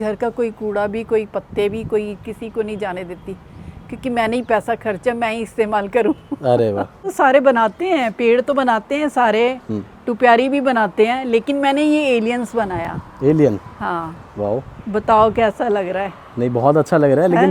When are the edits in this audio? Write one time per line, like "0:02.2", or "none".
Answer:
none